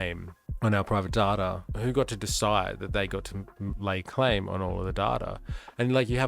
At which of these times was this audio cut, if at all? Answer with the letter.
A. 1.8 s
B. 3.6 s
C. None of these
A